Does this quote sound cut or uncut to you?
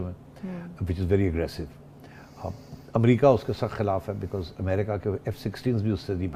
uncut